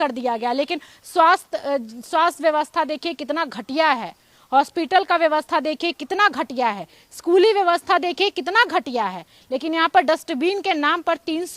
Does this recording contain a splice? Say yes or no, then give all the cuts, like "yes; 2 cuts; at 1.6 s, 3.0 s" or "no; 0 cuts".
yes; 1 cut; at 3.2 s